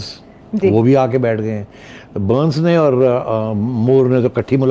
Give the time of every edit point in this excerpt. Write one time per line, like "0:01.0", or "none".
none